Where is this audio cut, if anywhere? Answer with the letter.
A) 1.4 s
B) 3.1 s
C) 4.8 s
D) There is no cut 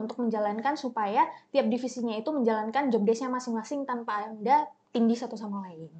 C